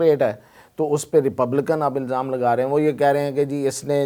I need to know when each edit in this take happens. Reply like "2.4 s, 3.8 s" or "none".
none